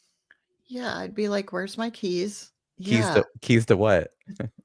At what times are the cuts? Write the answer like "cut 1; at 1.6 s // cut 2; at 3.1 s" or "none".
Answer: none